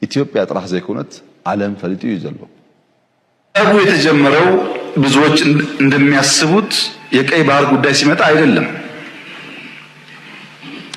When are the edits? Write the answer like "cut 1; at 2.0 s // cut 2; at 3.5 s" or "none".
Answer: cut 1; at 3.6 s